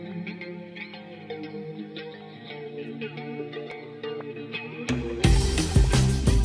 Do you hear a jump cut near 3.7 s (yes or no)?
yes